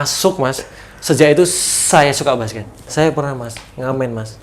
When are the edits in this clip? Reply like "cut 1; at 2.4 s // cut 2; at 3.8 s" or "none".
cut 1; at 2.9 s